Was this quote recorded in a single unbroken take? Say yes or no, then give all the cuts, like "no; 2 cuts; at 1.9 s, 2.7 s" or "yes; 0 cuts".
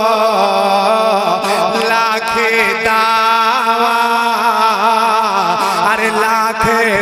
yes; 0 cuts